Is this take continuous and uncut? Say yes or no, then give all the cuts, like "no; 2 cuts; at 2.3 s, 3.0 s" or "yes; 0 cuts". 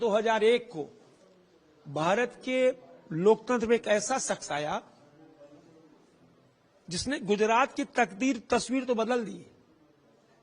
yes; 0 cuts